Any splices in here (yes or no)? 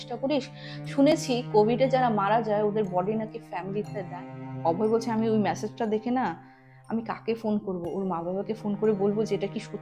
yes